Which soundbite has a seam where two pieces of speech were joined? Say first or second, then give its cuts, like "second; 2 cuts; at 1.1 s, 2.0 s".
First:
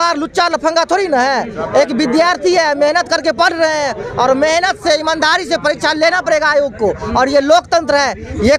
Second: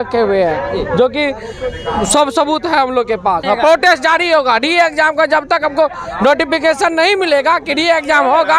second; 1 cut; at 3.4 s